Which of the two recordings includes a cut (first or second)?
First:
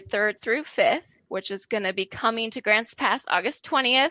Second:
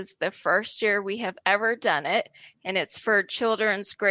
first